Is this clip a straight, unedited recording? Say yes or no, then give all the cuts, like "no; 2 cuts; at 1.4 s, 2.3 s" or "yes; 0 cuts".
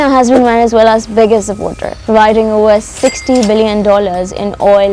yes; 0 cuts